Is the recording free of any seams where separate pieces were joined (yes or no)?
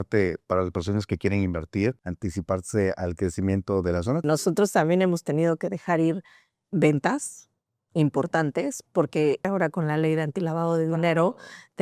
no